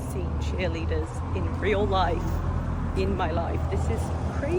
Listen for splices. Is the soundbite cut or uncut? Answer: uncut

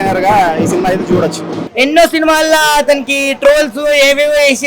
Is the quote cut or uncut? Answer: cut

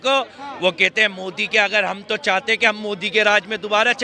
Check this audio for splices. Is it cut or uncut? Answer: uncut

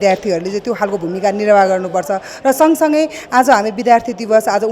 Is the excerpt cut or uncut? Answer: uncut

